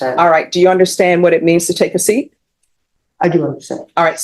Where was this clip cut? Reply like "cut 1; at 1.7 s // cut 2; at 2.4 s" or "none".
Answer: none